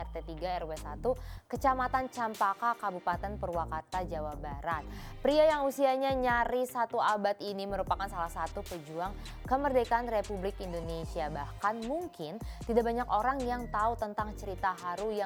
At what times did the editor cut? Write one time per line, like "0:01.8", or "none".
none